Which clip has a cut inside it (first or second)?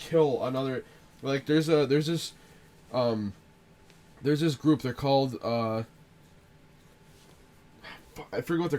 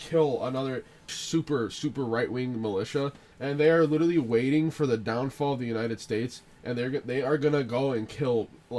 second